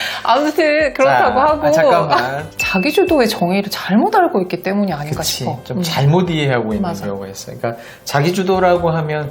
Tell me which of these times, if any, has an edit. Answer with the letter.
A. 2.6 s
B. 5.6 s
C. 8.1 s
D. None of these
A